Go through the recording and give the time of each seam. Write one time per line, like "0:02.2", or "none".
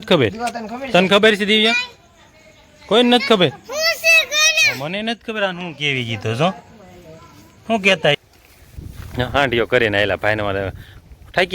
0:08.2